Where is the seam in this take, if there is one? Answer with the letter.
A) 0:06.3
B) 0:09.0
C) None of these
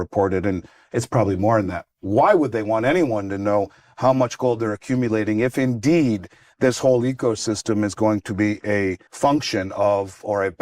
B